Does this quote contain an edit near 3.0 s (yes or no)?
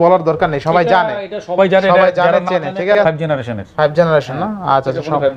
yes